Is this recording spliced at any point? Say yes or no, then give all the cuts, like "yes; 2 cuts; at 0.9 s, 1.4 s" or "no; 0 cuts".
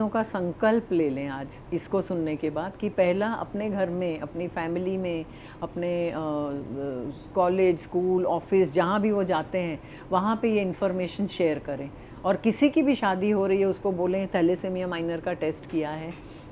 no; 0 cuts